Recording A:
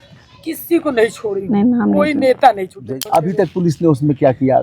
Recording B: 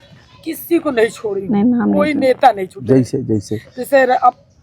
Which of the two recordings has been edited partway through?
A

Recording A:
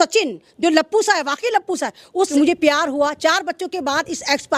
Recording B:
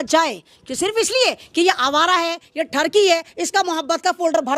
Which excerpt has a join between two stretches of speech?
A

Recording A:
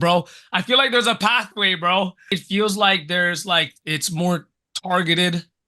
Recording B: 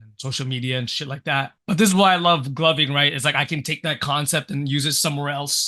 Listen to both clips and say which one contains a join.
A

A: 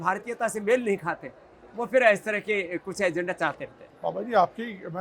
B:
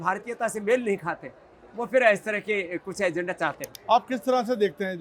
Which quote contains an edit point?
B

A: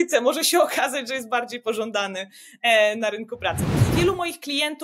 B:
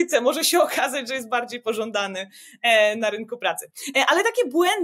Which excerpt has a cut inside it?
A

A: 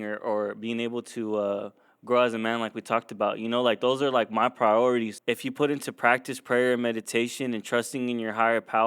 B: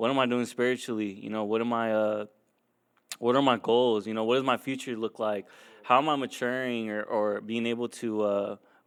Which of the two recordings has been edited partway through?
A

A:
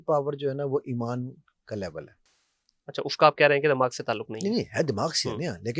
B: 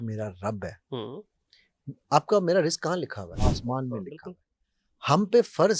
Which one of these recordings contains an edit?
B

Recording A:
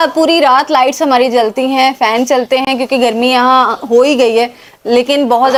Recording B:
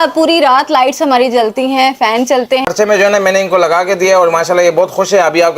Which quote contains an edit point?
B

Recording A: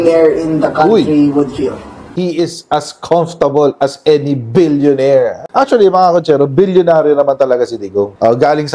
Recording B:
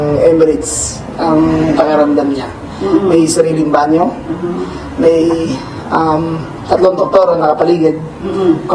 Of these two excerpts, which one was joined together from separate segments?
A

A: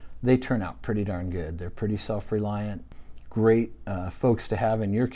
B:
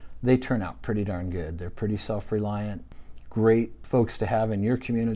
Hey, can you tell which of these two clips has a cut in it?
B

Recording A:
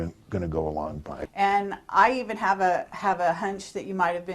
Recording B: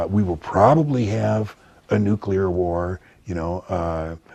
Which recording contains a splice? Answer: A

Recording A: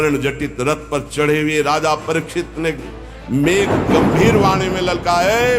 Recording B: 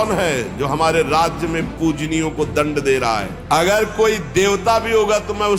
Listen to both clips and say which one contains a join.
B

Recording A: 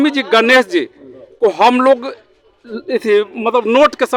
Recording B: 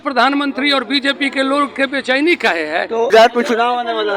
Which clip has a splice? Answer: B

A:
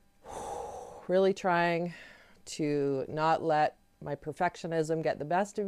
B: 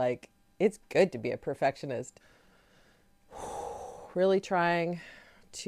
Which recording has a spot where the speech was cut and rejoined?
B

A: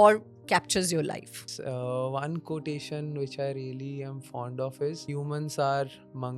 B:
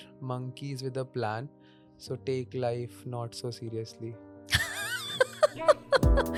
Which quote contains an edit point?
A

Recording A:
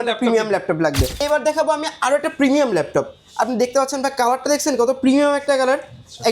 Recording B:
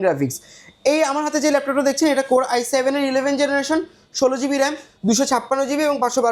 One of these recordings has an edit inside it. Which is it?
A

